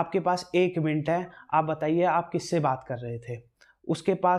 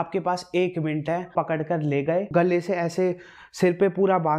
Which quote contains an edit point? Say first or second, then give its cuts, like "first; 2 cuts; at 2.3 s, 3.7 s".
second; 2 cuts; at 1.3 s, 2.3 s